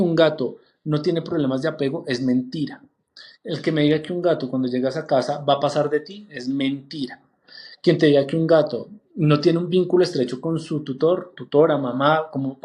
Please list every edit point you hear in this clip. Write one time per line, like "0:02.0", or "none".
none